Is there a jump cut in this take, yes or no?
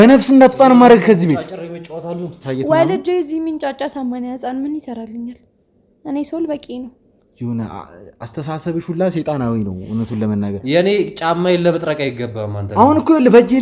yes